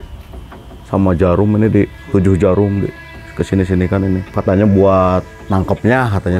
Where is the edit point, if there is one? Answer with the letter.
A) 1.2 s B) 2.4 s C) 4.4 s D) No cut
C